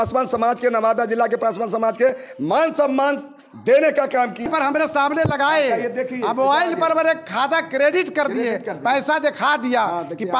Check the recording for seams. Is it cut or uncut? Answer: cut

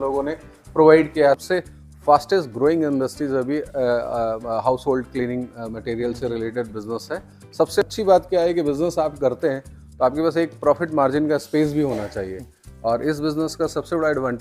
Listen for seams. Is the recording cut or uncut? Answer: cut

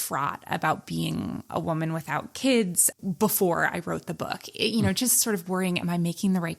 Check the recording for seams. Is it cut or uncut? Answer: uncut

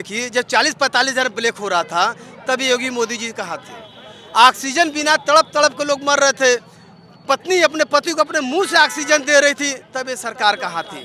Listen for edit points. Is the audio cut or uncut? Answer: uncut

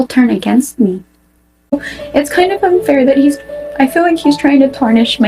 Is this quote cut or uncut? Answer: cut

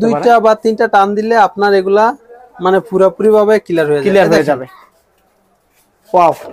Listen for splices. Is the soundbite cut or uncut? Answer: uncut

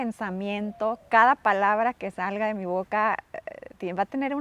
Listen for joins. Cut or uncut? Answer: uncut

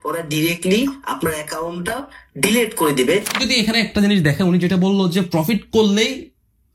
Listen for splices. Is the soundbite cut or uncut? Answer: cut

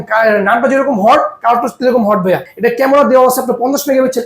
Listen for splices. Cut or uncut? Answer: cut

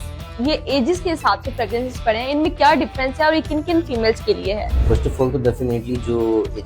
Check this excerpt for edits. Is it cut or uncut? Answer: cut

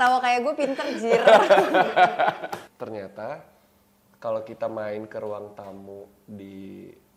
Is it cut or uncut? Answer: cut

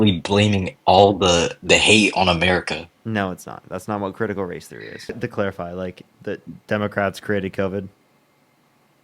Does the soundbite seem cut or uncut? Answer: cut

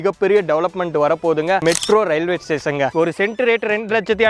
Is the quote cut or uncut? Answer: cut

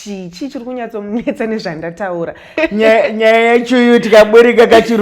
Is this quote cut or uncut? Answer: cut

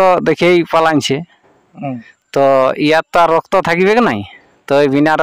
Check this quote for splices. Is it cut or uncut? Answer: uncut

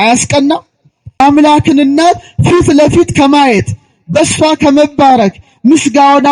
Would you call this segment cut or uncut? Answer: cut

